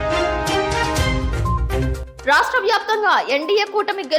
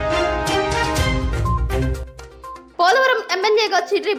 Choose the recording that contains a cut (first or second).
first